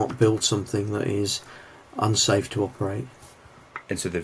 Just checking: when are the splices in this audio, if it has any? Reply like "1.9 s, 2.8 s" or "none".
none